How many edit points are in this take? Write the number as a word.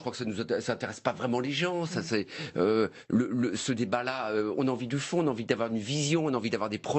one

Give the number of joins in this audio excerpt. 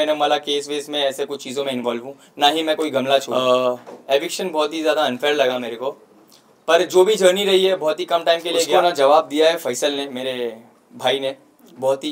two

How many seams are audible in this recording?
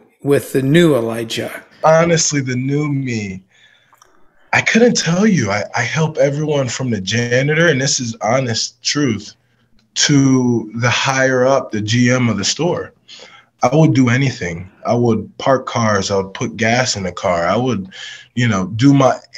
one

